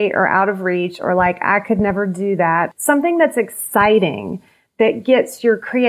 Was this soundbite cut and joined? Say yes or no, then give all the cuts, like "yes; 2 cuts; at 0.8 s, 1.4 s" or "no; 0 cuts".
yes; 1 cut; at 2.7 s